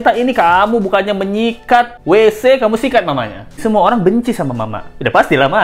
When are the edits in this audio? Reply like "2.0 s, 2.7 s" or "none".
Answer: 3.6 s